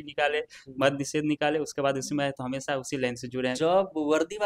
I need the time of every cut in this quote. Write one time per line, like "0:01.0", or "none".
0:03.6